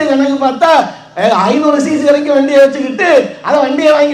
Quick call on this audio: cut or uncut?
uncut